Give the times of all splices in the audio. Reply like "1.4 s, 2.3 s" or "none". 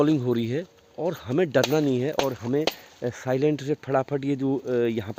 none